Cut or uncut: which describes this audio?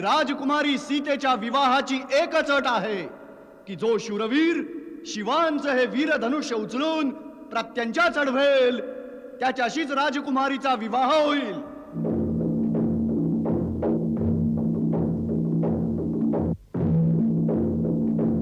uncut